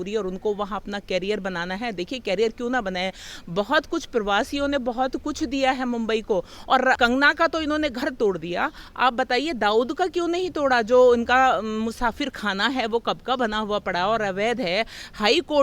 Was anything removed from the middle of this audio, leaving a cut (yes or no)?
yes